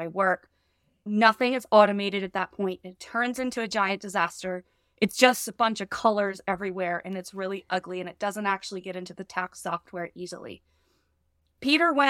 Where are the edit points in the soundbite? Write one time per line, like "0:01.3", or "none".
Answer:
0:01.1